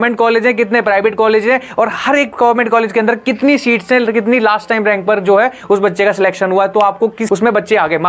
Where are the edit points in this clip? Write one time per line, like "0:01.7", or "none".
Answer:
0:07.2